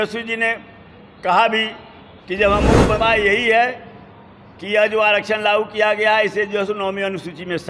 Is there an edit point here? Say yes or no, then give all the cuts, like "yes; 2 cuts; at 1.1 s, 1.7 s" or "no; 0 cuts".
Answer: yes; 1 cut; at 3.0 s